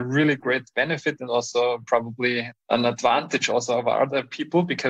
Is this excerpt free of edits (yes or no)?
no